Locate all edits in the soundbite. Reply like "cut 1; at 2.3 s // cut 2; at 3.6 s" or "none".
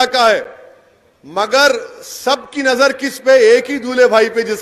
none